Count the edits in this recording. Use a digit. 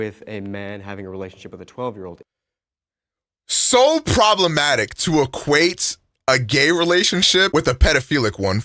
0